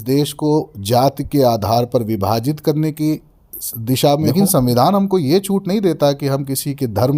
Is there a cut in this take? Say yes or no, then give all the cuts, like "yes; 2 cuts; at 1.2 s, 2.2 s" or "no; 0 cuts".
yes; 1 cut; at 4.3 s